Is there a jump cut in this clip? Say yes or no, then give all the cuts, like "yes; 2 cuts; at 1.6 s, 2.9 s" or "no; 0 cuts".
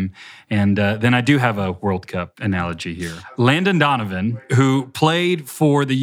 yes; 2 cuts; at 2.3 s, 3.2 s